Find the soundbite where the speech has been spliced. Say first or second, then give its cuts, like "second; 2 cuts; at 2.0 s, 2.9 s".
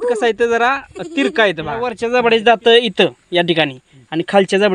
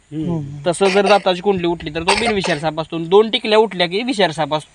first; 1 cut; at 2.0 s